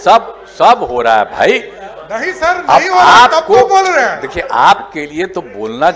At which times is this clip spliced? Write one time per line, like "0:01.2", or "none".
none